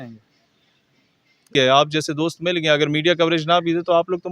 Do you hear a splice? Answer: yes; 1 cut; at 1.5 s

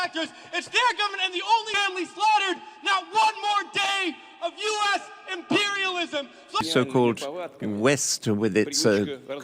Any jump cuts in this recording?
yes; 2 cuts; at 1.7 s, 6.6 s

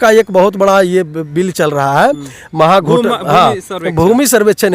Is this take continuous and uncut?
yes; 0 cuts

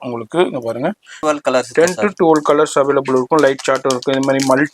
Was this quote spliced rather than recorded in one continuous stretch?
yes; 1 cut; at 1.1 s

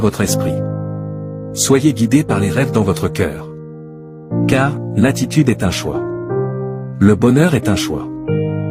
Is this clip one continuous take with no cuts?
yes; 0 cuts

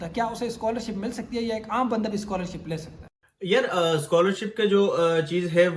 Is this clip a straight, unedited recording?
yes; 0 cuts

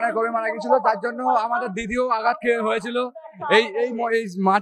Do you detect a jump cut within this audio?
no; 0 cuts

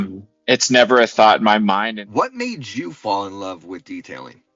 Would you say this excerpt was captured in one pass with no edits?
no; 1 cut; at 1.9 s

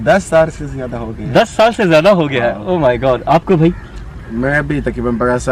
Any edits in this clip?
no; 0 cuts

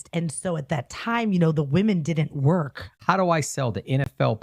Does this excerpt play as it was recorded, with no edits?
no; 1 cut; at 2.8 s

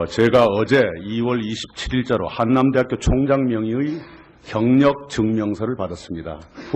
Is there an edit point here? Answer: yes; 1 cut; at 2.1 s

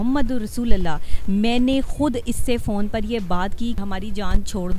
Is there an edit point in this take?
yes; 1 cut; at 3.8 s

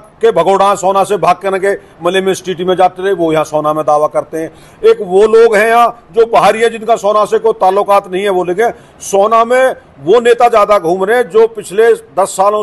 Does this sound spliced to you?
no; 0 cuts

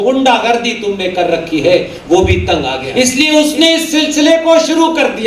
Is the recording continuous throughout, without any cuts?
no; 1 cut; at 2.8 s

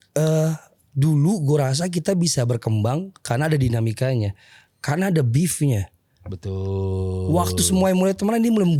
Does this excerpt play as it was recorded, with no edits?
yes; 0 cuts

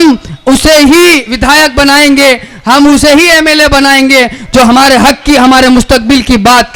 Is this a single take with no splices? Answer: yes; 0 cuts

